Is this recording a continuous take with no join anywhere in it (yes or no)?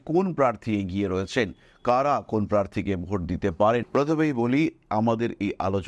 no